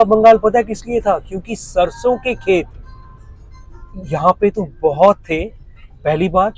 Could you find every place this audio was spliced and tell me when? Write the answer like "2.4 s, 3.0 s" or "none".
none